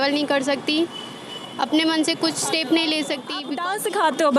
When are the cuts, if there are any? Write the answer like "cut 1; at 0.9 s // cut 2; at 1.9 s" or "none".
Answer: cut 1; at 3.5 s